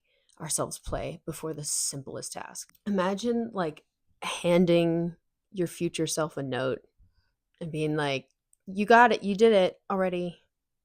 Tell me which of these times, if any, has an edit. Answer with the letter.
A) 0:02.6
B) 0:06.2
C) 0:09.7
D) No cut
A